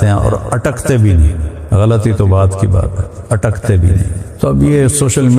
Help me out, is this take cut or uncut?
cut